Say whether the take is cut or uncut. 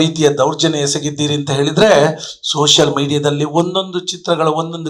uncut